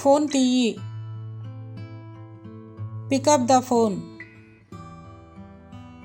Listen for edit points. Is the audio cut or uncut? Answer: uncut